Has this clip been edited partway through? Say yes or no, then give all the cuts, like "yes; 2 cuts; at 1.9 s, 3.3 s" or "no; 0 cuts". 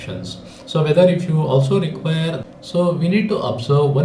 yes; 1 cut; at 2.4 s